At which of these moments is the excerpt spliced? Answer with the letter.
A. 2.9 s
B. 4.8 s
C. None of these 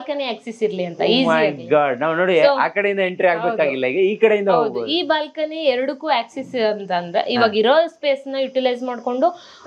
C